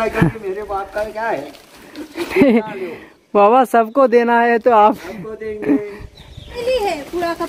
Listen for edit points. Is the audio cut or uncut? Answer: cut